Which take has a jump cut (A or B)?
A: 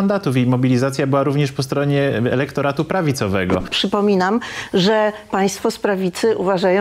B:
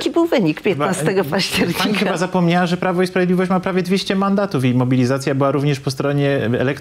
A